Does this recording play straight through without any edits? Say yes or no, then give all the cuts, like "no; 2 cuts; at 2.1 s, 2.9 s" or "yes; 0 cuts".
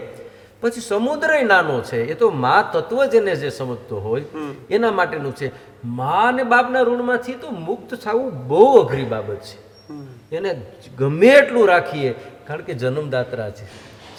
yes; 0 cuts